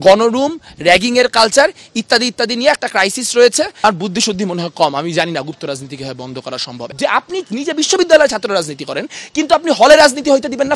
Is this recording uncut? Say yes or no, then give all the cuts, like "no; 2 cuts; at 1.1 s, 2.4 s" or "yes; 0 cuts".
no; 2 cuts; at 3.7 s, 6.8 s